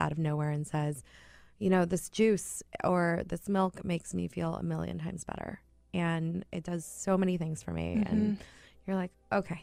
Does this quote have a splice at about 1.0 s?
no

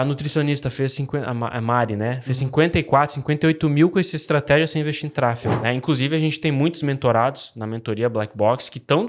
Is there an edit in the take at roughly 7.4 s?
no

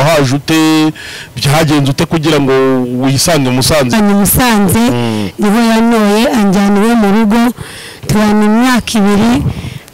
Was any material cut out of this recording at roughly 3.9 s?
yes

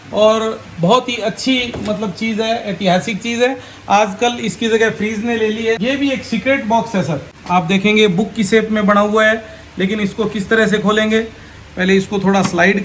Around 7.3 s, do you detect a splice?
yes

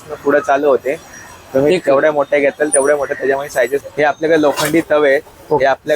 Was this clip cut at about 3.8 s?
yes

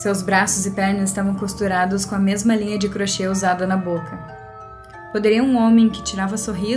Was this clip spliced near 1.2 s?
no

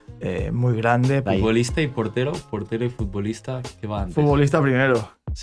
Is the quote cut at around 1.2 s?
yes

